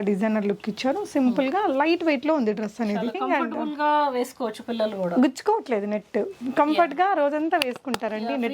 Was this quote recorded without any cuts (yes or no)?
no